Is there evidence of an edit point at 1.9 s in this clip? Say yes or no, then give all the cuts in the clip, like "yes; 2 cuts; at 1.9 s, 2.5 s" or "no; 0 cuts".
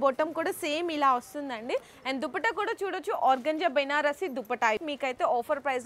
no; 1 cut; at 4.8 s